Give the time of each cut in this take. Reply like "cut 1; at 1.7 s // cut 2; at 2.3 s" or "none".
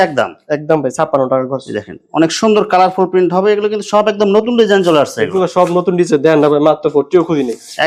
none